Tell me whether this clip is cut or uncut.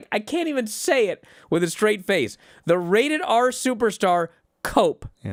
uncut